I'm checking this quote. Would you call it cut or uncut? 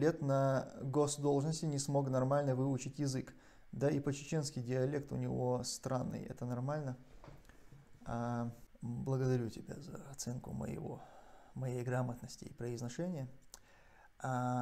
cut